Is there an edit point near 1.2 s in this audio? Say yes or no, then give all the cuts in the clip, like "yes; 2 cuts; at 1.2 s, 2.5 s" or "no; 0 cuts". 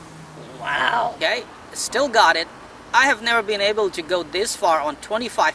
yes; 1 cut; at 1.2 s